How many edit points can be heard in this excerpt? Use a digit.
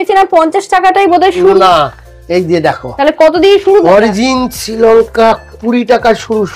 0